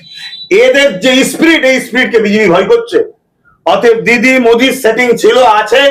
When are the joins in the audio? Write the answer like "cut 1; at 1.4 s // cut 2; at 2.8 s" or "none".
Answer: none